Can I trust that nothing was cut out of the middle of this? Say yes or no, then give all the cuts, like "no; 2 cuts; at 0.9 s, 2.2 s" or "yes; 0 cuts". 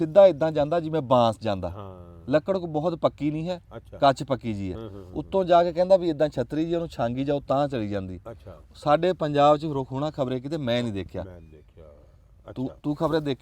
yes; 0 cuts